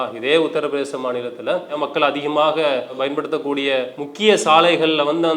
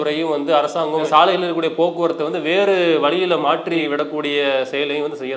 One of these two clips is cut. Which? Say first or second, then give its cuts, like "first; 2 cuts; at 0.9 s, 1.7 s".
first; 2 cuts; at 1.7 s, 4.0 s